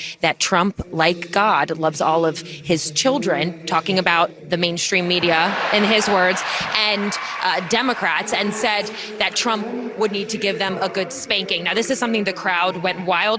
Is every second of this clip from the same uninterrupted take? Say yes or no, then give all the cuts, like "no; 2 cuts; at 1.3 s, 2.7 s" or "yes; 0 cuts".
yes; 0 cuts